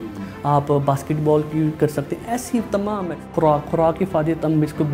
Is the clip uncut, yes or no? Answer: no